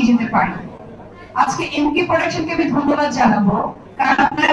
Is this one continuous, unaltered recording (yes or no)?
yes